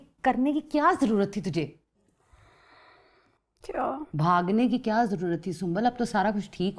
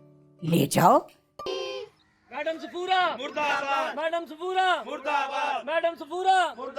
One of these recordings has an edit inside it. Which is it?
second; 1 cut; at 1.4 s

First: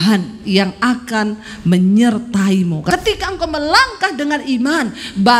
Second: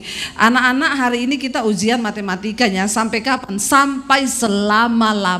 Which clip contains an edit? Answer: first; 1 cut; at 2.9 s

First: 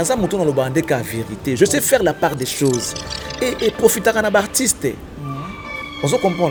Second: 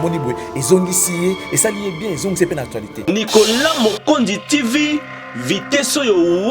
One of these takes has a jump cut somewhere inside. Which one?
second; 1 cut; at 3.0 s

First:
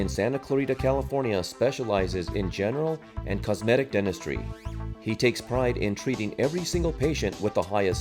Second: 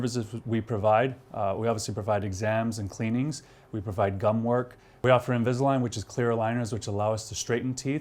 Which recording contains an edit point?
second; 1 cut; at 4.8 s

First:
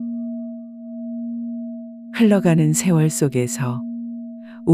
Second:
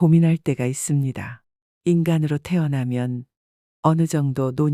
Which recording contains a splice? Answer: first; 1 cut; at 2.1 s

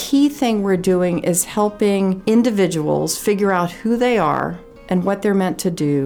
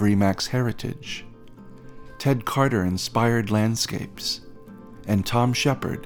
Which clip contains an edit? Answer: first; 1 cut; at 2.2 s

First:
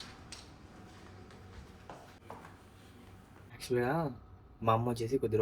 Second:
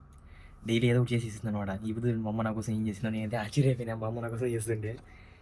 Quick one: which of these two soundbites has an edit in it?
first; 1 cut; at 3.3 s

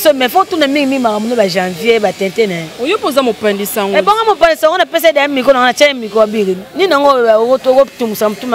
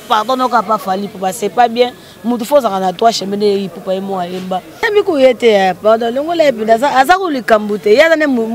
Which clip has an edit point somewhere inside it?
second; 1 cut; at 4.8 s

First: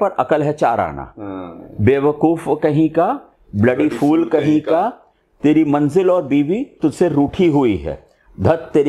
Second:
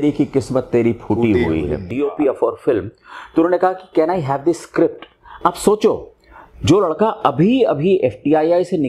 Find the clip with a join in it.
second; 1 cut; at 1.9 s

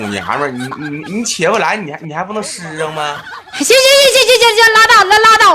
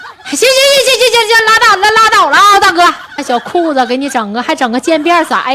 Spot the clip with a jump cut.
second; 1 cut; at 3.2 s

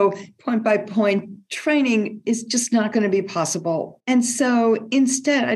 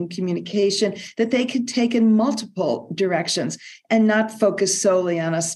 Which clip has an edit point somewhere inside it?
first; 1 cut; at 3.9 s

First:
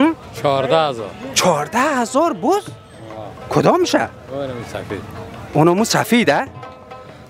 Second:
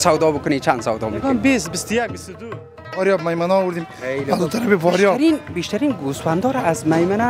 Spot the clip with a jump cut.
second; 1 cut; at 3.0 s

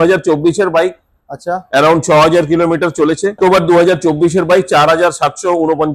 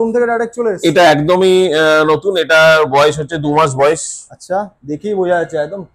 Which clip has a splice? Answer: first; 1 cut; at 3.3 s

